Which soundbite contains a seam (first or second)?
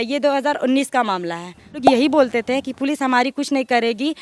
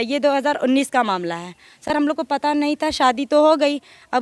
first